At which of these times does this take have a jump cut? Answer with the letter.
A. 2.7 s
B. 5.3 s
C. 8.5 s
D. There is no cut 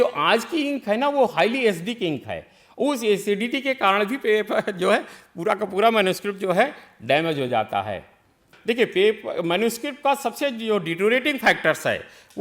C